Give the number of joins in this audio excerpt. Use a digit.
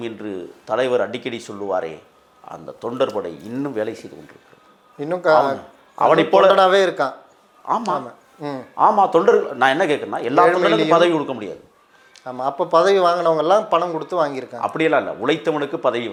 0